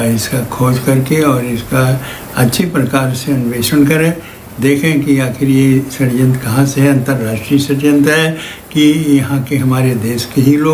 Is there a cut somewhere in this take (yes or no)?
no